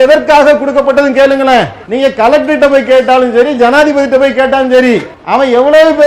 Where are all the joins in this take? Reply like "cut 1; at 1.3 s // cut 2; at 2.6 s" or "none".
cut 1; at 1.8 s // cut 2; at 5.1 s